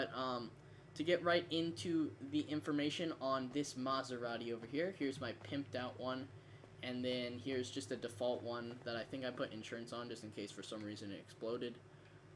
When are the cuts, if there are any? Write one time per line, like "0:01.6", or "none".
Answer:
0:10.8

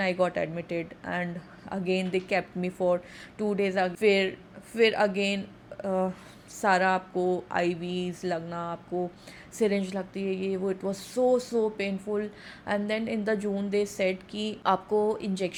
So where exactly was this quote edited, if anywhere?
none

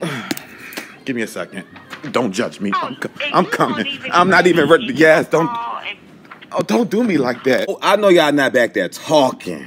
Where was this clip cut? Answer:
0:07.8

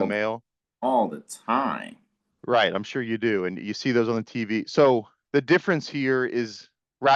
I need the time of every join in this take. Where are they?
none

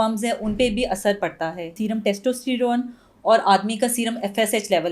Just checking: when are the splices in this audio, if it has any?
0:01.7

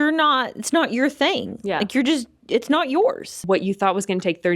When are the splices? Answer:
0:03.3

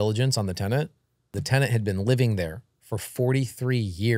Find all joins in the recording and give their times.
0:01.4

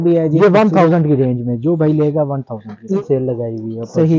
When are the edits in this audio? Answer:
0:03.0

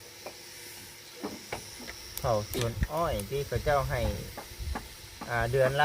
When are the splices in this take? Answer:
0:01.7

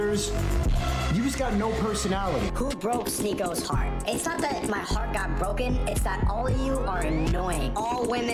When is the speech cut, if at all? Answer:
none

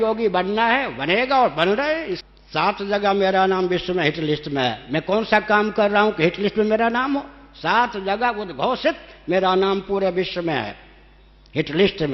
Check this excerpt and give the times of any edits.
0:02.2

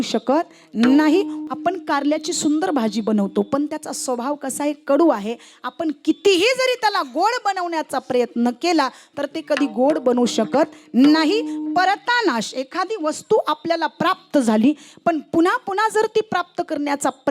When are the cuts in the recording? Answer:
0:01.4

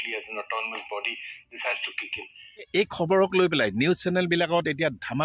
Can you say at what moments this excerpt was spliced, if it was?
0:02.6

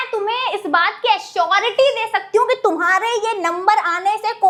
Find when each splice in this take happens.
none

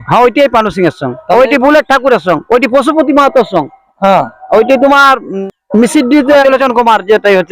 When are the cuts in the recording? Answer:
0:05.3
0:06.4

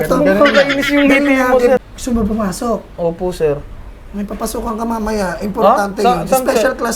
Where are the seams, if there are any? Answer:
0:01.8

